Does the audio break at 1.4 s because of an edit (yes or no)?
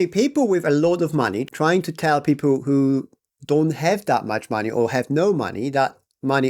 yes